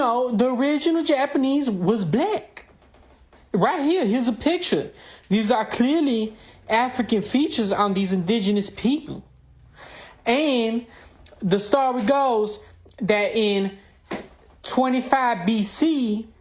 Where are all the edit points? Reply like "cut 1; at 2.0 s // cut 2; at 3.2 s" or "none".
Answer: none